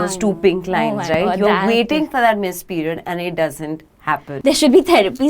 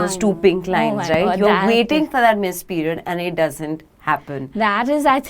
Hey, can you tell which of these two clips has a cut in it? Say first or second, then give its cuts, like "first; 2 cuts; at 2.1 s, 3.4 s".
first; 1 cut; at 4.3 s